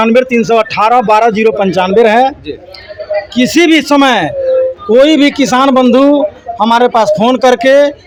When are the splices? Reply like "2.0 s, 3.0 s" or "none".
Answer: none

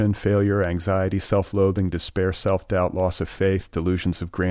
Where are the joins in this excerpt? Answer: none

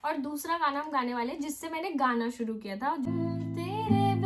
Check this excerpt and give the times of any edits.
3.1 s

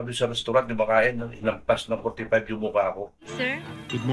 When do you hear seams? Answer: 3.2 s

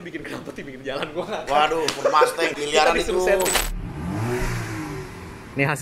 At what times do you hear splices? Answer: 2.6 s, 3.6 s

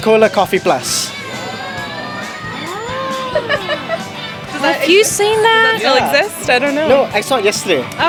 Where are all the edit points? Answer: none

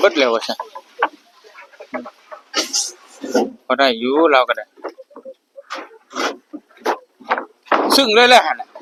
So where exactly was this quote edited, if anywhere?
none

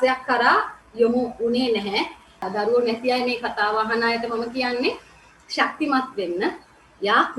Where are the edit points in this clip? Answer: 2.3 s

